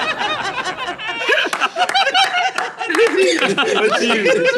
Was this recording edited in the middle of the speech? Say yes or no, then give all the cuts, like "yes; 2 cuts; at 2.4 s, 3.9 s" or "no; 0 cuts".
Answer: no; 0 cuts